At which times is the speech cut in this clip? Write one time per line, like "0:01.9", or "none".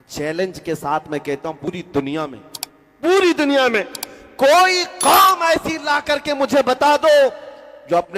0:01.7